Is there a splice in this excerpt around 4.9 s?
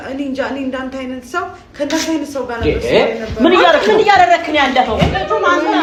no; 0 cuts

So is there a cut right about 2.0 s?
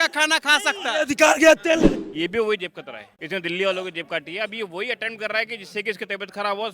yes; 1 cut; at 2.0 s

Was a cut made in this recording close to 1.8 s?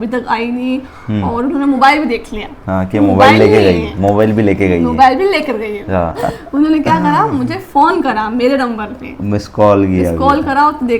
no; 1 cut; at 6.2 s

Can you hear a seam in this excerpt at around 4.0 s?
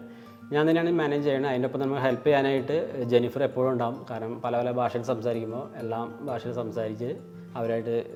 no; 0 cuts

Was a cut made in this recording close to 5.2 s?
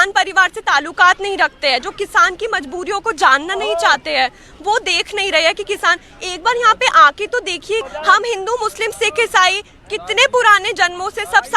no; 1 cut; at 7.8 s

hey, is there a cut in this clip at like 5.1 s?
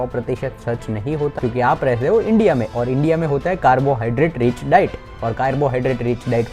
no; 1 cut; at 1.3 s

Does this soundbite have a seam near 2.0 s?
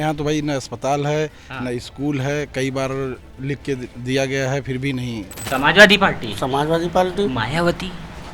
no; 1 cut; at 5.5 s

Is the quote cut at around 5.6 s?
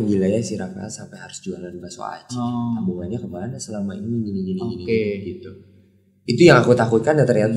no; 0 cuts

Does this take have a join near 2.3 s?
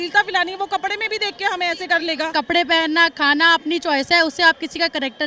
yes; 1 cut; at 2.3 s

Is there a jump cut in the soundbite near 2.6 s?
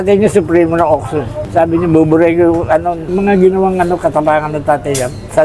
no; 0 cuts

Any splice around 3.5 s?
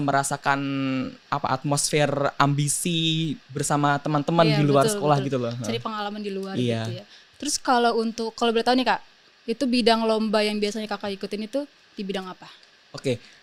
no; 0 cuts

